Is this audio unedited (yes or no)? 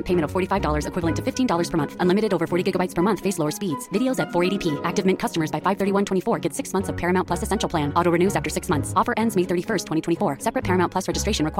yes